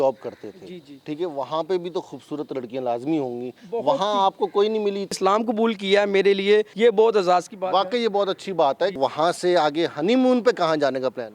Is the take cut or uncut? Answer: cut